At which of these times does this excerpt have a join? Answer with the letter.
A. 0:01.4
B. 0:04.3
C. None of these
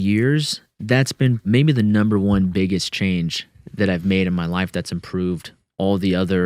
A